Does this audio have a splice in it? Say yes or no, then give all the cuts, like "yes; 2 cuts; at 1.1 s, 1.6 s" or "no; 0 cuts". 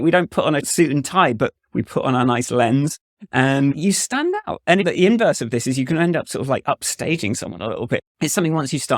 yes; 1 cut; at 8.1 s